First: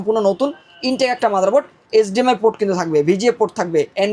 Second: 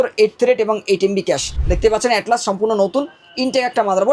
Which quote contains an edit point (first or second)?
second